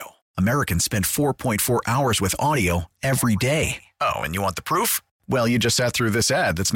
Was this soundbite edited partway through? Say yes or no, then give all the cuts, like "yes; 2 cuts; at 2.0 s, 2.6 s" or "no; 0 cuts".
no; 0 cuts